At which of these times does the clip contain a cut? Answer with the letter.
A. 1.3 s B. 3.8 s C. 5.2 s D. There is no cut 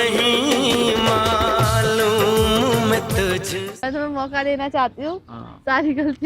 B